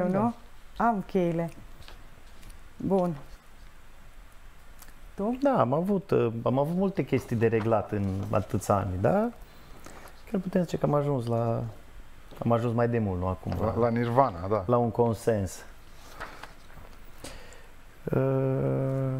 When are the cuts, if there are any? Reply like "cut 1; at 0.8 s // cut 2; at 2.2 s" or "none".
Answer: none